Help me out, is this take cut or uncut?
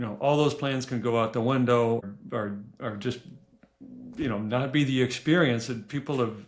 cut